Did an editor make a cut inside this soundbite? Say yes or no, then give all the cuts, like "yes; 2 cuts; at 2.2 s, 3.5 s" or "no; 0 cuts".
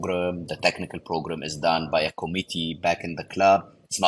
yes; 1 cut; at 2.7 s